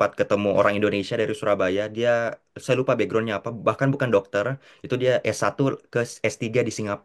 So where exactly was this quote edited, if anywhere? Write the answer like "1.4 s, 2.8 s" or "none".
none

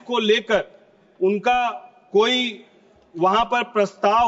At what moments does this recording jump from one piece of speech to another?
none

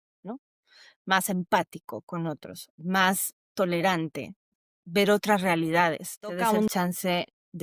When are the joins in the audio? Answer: 4.5 s, 6.4 s

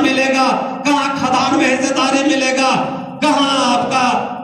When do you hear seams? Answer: none

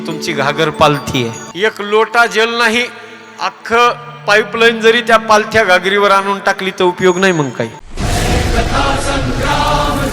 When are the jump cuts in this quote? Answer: 1.4 s, 7.8 s

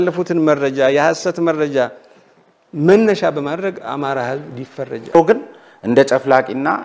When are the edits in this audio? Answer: 5.2 s

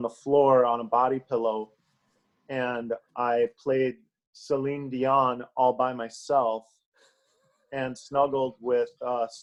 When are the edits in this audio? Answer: none

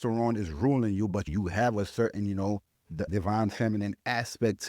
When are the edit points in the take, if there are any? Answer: 1.3 s, 3.0 s

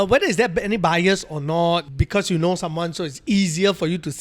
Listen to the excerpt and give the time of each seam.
1.9 s

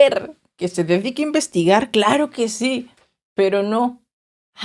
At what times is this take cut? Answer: none

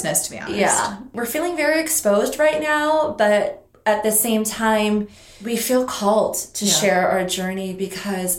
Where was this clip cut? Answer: 1.2 s, 3.7 s, 5.3 s

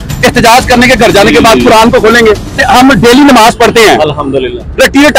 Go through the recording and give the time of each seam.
2.6 s

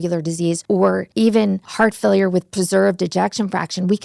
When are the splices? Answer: 0.9 s, 1.7 s

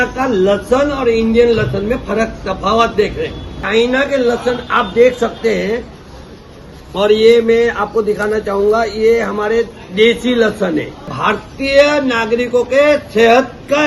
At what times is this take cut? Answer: 3.6 s, 11.2 s

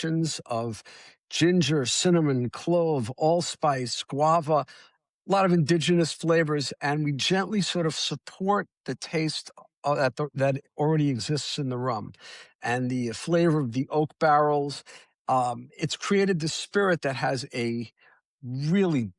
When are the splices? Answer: none

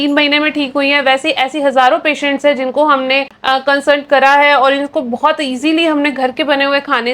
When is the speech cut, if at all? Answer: none

